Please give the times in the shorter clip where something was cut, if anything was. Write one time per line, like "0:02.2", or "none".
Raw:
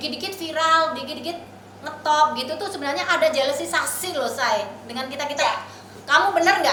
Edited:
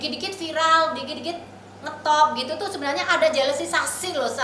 none